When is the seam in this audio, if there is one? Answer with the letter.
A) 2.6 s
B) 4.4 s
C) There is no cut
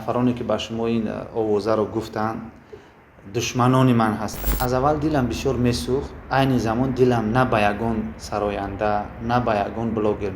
B